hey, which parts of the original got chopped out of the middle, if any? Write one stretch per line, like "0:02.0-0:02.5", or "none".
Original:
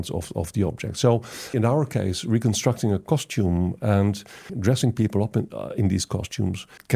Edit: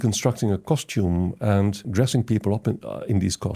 0:04.2-0:04.5